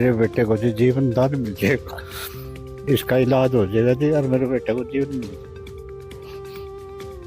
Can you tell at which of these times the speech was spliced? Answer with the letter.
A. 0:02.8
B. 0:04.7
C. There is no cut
A